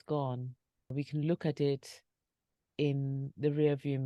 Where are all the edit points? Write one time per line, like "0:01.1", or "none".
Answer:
0:00.9

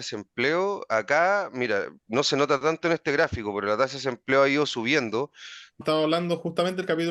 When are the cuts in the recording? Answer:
0:05.8

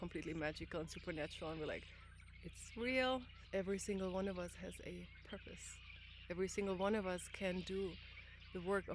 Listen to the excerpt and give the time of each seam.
0:03.4

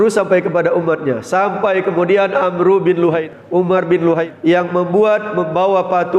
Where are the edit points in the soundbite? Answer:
0:03.2
0:04.3

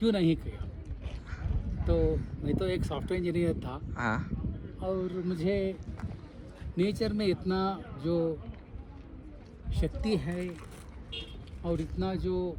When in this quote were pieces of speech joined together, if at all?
none

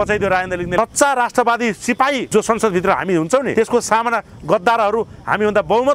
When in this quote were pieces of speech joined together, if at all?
0:00.8
0:02.2
0:03.5

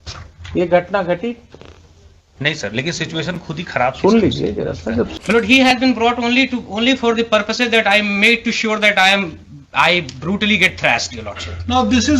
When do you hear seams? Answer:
0:05.1

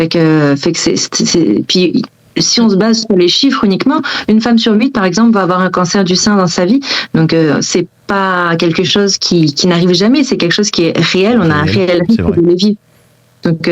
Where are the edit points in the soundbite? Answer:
none

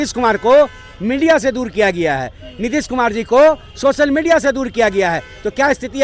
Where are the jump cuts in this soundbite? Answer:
none

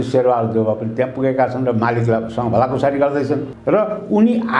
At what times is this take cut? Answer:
0:03.5

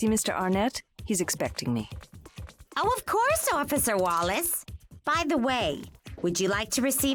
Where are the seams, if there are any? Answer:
none

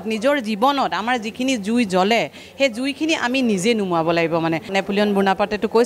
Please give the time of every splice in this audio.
0:04.7

